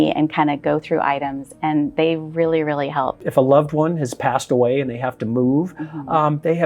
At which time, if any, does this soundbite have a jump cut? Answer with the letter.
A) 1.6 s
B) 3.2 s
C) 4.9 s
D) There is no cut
B